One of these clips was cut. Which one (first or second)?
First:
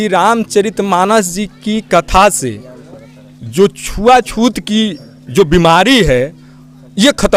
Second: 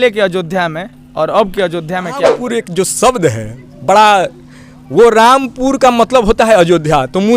second